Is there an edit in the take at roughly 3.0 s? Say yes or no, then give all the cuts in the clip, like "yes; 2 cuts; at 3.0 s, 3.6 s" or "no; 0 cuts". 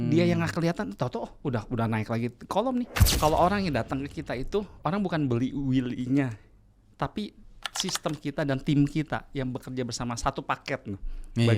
yes; 1 cut; at 3.0 s